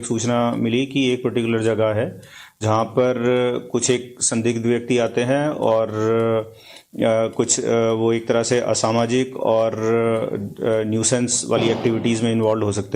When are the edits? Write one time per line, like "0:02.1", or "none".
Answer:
0:08.8